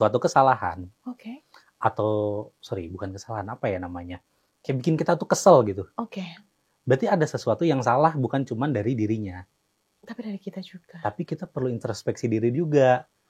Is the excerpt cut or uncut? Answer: uncut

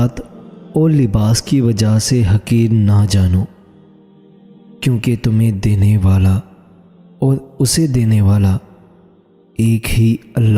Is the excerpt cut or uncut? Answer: uncut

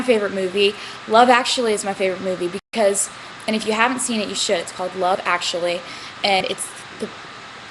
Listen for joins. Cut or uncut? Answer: uncut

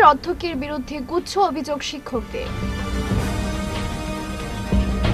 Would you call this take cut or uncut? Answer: uncut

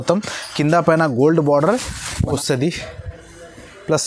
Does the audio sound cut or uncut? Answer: cut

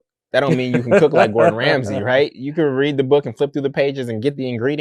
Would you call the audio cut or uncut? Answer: uncut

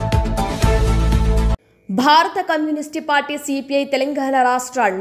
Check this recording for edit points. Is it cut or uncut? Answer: cut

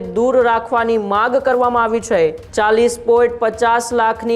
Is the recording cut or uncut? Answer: cut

